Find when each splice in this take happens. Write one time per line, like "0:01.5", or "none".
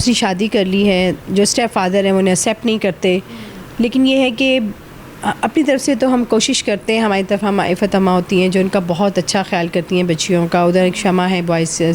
none